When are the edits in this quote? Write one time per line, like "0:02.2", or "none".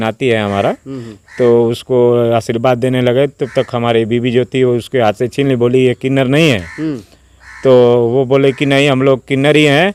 none